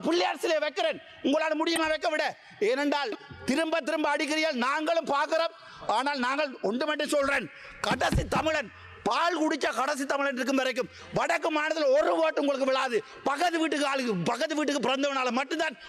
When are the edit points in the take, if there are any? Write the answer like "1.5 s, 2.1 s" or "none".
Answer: none